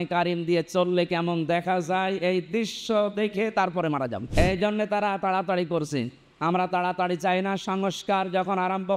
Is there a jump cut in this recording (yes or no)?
yes